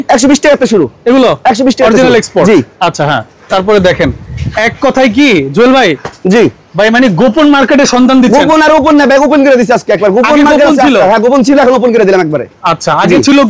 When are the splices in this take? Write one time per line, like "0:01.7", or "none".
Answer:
none